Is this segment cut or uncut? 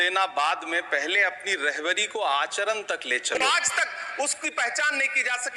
cut